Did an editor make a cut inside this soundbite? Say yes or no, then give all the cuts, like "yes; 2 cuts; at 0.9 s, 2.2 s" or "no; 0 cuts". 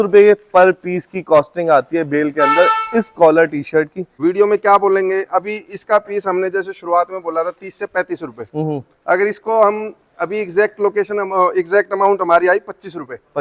yes; 1 cut; at 4.0 s